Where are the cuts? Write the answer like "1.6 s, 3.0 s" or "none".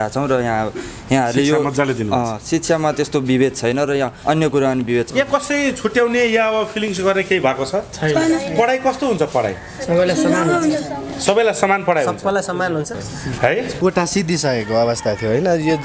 4.2 s, 5.1 s, 13.0 s, 13.7 s